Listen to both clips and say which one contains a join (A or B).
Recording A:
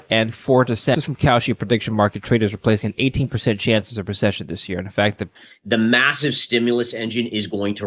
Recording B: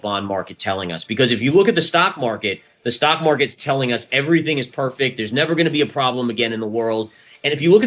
A